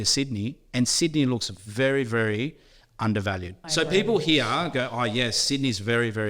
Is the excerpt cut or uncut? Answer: cut